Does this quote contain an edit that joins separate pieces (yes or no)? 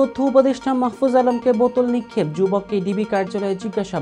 no